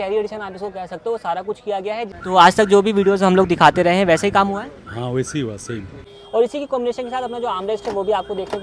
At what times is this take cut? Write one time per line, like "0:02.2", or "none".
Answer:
0:02.1
0:06.2